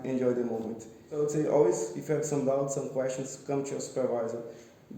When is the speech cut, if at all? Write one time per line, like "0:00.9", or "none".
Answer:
0:01.1